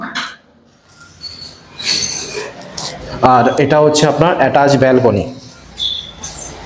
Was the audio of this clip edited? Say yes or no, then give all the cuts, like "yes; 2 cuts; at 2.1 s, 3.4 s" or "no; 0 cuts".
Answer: no; 0 cuts